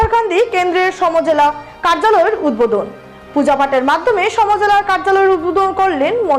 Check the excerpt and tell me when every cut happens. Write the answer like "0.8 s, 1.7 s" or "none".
none